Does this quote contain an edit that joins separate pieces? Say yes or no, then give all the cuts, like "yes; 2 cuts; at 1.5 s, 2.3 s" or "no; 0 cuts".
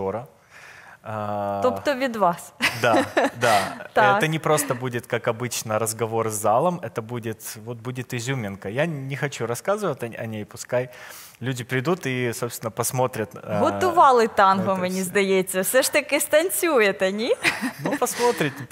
no; 0 cuts